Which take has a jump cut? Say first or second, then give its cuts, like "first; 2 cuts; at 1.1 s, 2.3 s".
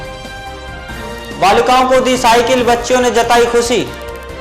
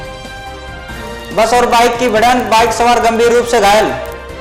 first; 1 cut; at 1.1 s